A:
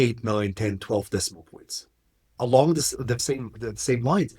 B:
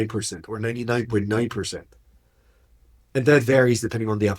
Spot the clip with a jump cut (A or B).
A